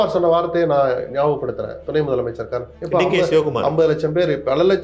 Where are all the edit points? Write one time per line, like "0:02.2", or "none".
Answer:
0:02.7

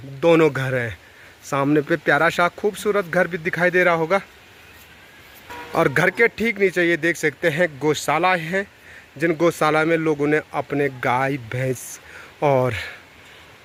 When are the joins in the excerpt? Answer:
none

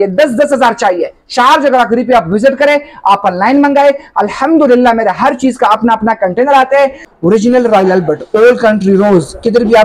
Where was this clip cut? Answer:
0:07.1

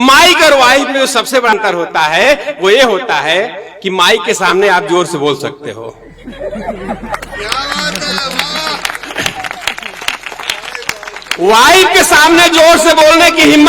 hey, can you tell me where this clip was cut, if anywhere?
0:01.5

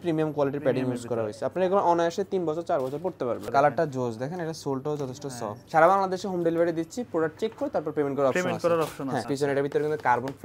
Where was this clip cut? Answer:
0:03.4
0:05.5
0:09.2

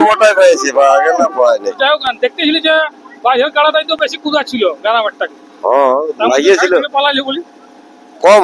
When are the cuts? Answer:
none

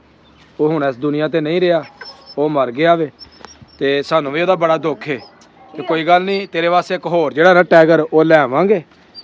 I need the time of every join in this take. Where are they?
none

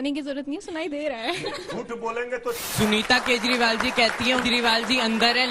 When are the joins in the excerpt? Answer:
0:02.7
0:04.4

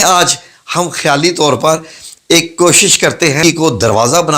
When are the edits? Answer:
0:03.4

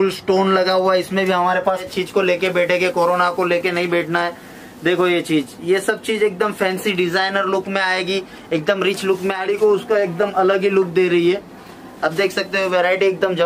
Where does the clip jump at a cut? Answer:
0:01.8
0:09.4

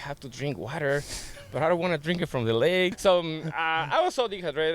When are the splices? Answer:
0:03.0

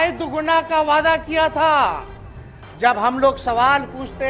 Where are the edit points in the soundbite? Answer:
none

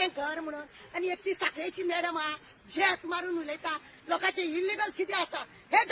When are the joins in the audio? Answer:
0:03.9

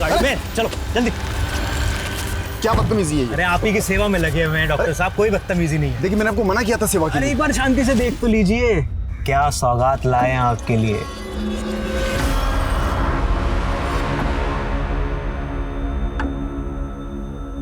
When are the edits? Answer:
none

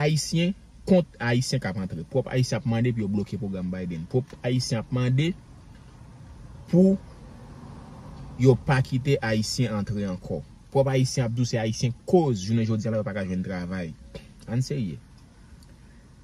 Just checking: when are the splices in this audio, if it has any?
none

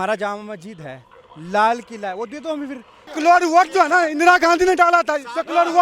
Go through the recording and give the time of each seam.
0:03.1

